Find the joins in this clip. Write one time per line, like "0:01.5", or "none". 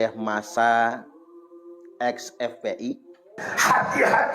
0:03.4

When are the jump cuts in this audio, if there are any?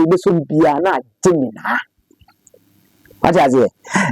none

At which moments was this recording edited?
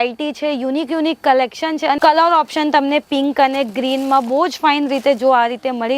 0:02.0

